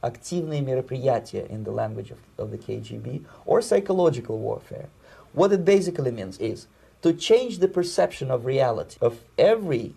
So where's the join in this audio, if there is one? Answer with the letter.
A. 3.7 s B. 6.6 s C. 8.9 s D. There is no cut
C